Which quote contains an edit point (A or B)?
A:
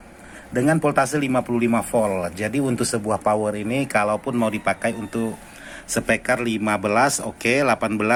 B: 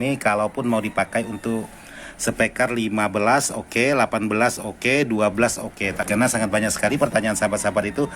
B